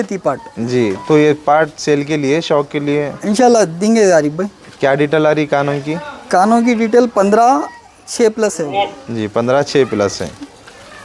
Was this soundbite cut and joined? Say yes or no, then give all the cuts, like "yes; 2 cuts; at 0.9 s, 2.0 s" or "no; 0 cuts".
no; 0 cuts